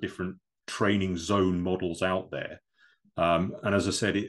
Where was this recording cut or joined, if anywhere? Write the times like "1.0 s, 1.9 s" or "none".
none